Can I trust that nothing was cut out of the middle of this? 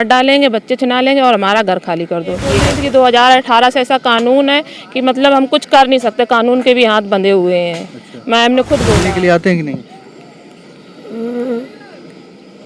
no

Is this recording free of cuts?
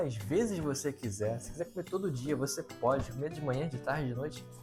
yes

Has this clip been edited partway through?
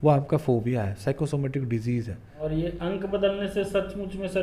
yes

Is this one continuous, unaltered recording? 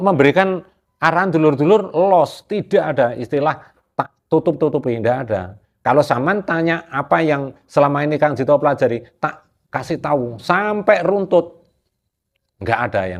yes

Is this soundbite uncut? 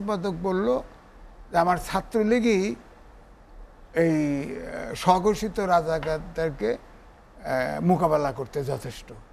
yes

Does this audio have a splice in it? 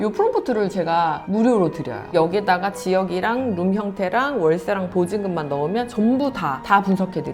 yes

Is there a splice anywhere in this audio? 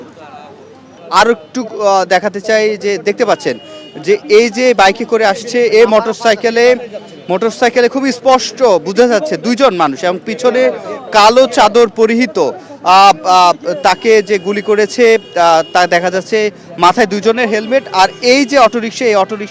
yes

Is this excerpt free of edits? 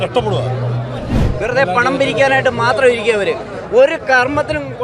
no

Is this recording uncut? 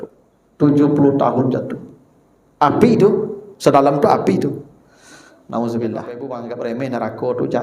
no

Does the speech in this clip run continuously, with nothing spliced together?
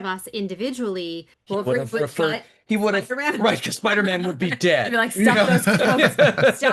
no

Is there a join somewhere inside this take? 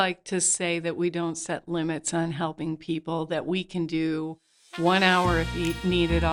no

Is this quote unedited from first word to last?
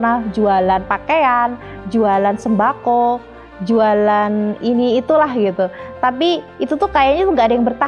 yes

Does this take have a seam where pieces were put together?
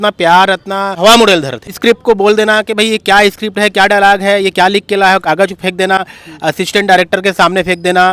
yes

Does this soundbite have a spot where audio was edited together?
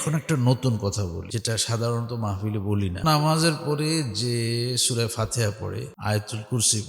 yes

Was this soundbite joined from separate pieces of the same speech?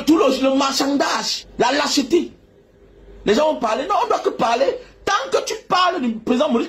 yes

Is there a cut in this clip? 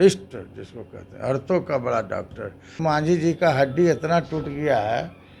yes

